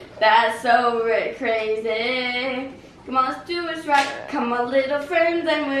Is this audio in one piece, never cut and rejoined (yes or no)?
yes